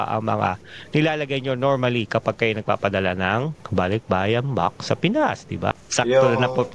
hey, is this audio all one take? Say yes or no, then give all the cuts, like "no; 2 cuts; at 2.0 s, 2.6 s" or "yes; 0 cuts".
no; 1 cut; at 5.8 s